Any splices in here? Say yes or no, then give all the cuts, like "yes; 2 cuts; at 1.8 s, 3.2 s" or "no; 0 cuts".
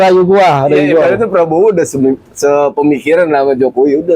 no; 0 cuts